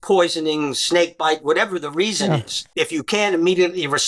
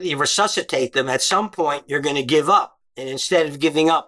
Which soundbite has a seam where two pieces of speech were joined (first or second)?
first